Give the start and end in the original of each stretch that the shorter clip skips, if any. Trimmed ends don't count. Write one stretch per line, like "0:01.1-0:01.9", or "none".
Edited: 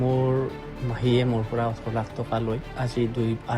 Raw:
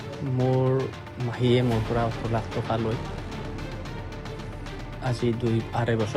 0:03.0-0:04.9